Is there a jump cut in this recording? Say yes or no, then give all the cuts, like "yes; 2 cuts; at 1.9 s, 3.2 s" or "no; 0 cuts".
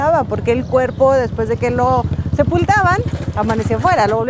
no; 0 cuts